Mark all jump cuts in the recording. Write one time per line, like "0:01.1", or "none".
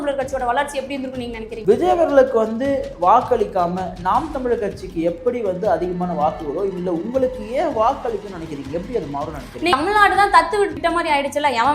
0:01.5
0:09.7
0:10.8